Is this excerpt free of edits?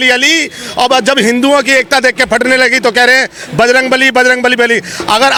yes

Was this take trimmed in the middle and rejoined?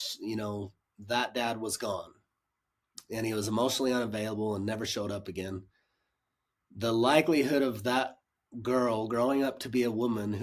no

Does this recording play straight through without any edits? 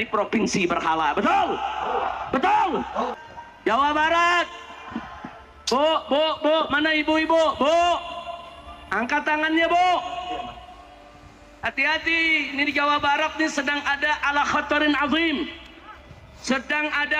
no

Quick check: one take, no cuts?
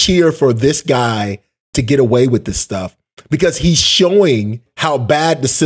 no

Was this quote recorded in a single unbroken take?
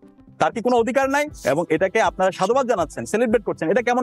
no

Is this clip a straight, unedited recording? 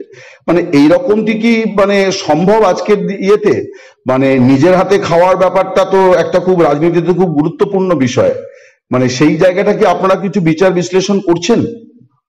yes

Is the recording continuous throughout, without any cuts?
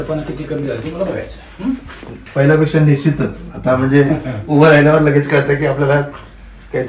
no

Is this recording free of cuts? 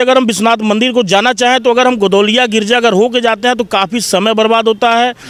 yes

